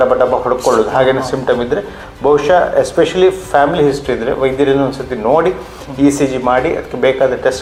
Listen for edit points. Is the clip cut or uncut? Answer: uncut